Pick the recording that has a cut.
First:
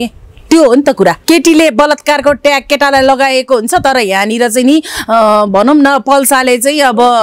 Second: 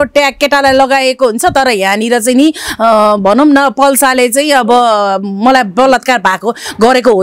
first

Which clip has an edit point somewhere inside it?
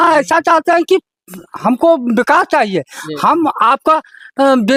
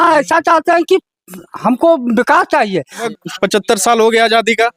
second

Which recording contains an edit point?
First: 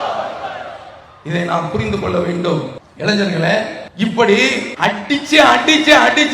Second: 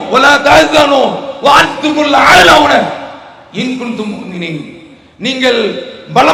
first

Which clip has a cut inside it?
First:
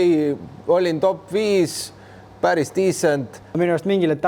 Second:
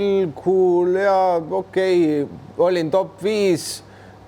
first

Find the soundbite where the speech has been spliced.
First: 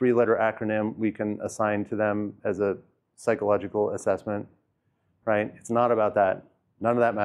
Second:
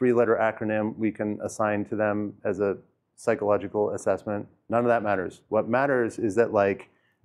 second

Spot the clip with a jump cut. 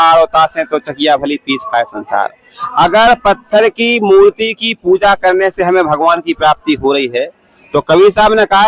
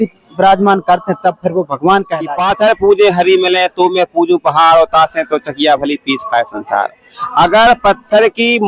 second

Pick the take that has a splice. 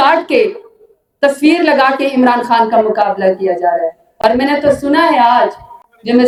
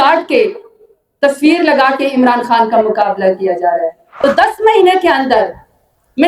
second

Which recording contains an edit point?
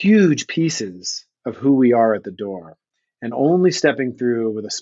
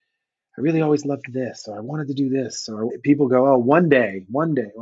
second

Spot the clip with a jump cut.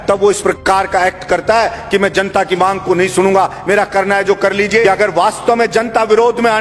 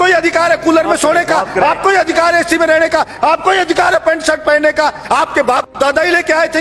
first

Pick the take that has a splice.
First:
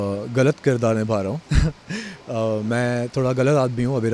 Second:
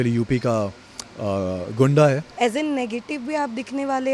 second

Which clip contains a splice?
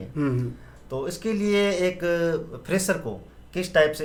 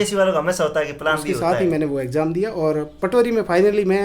second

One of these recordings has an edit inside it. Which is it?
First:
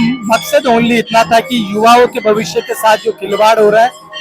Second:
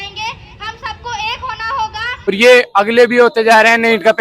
second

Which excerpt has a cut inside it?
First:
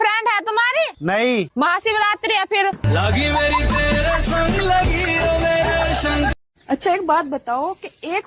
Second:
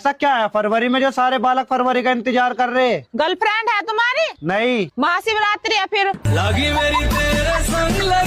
first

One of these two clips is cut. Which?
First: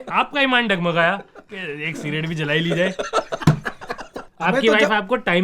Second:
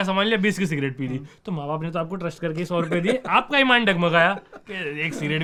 first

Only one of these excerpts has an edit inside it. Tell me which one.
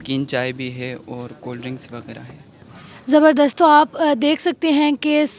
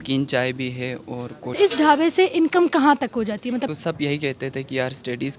second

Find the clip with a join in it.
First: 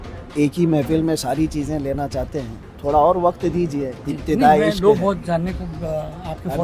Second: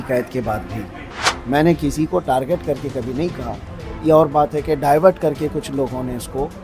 second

